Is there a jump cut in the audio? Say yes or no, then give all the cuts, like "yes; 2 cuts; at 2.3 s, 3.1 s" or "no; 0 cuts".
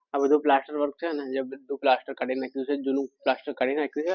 no; 0 cuts